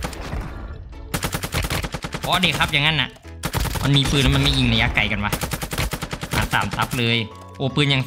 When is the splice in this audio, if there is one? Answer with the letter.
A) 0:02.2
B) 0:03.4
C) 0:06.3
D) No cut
B